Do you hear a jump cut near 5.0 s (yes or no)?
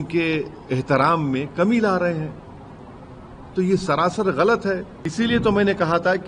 yes